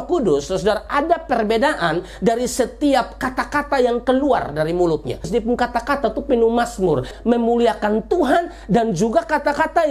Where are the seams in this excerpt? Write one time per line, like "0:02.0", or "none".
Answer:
0:05.3
0:07.1